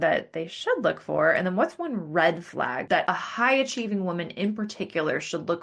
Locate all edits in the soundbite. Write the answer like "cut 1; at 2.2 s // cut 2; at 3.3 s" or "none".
cut 1; at 3.0 s

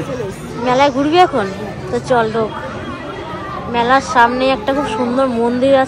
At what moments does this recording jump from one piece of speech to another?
none

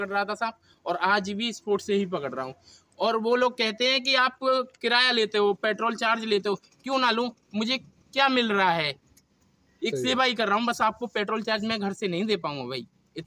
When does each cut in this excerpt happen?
none

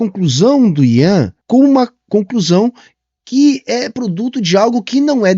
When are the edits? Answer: cut 1; at 1.4 s

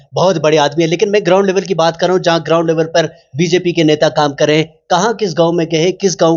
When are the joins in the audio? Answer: none

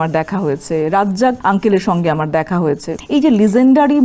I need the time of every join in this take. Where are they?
cut 1; at 1.4 s // cut 2; at 2.9 s

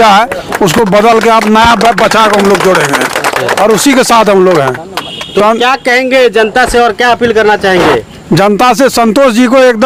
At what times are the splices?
none

